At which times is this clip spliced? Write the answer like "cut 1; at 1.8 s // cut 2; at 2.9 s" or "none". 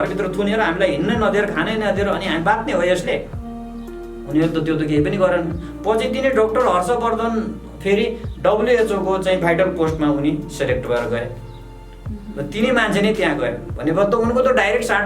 none